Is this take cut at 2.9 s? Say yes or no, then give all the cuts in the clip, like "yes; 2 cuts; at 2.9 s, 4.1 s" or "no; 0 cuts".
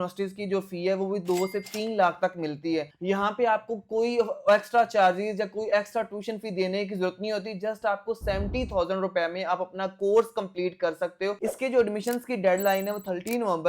no; 0 cuts